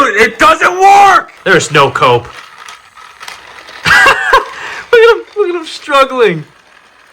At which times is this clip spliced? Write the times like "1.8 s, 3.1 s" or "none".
1.3 s

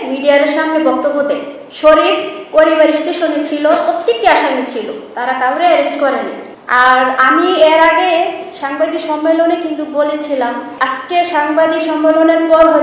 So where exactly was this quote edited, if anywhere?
10.7 s

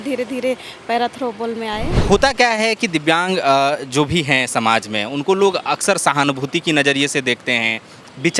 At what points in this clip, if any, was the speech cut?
2.0 s

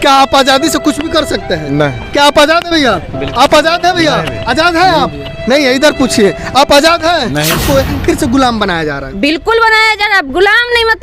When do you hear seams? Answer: 7.6 s

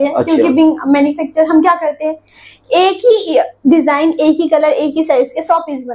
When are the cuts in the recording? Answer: none

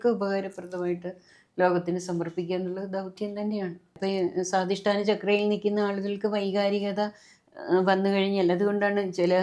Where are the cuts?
3.9 s

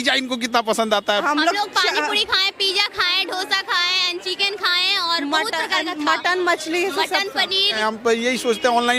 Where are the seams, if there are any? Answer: 1.2 s, 7.8 s

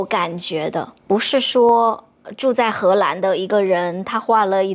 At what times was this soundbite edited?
0.9 s

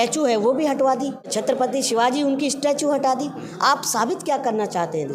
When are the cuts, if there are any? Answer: 1.3 s

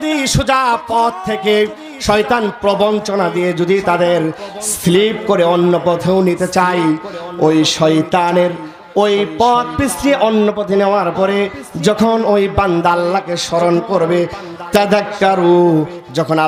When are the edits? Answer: none

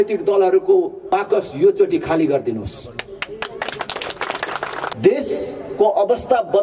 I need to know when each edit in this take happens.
1.0 s, 4.9 s

